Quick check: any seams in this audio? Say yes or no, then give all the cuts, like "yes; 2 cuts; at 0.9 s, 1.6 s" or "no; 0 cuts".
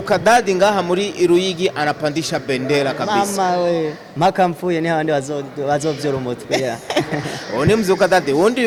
no; 0 cuts